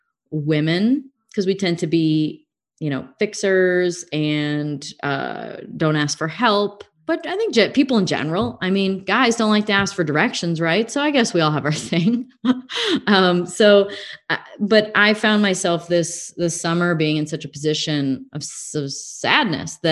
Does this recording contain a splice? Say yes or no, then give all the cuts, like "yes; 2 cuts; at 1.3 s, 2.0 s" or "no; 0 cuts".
yes; 2 cuts; at 1.2 s, 7.0 s